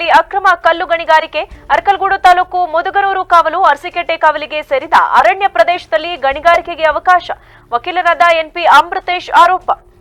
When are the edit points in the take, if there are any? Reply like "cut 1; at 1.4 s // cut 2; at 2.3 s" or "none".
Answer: none

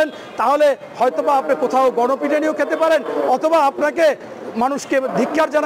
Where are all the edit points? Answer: none

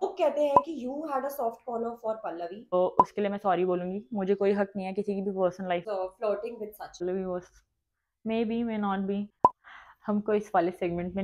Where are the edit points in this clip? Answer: cut 1; at 2.7 s // cut 2; at 5.8 s // cut 3; at 7.0 s // cut 4; at 9.4 s

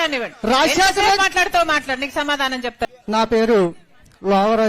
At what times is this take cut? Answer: cut 1; at 2.9 s

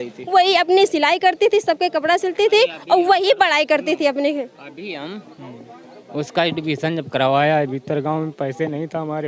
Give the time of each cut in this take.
none

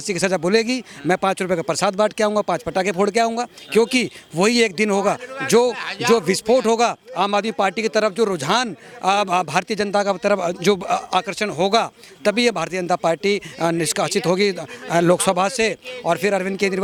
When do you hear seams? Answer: none

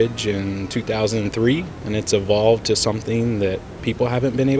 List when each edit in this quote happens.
cut 1; at 1.8 s // cut 2; at 3.7 s

